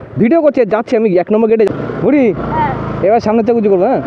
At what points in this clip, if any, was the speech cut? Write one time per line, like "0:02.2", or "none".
0:01.7